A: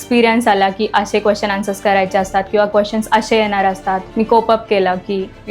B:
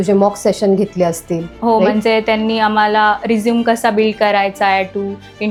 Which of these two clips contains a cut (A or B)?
A